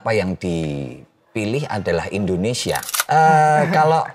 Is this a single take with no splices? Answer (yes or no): no